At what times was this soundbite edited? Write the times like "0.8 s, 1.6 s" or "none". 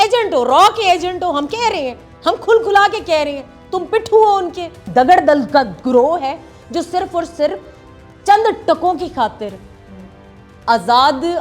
4.8 s